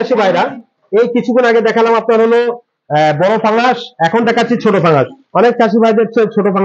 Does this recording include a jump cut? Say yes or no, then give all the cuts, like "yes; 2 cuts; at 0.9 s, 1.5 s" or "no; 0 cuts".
no; 0 cuts